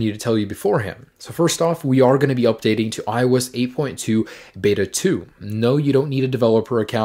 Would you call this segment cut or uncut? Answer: uncut